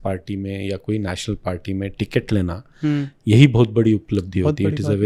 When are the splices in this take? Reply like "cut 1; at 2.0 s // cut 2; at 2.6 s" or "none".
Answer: none